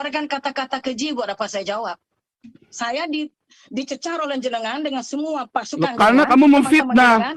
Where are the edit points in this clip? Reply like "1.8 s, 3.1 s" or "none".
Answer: none